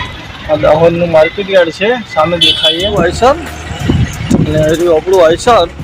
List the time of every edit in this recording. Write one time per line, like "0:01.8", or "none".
0:02.9